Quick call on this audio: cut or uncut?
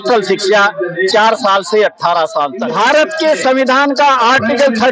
cut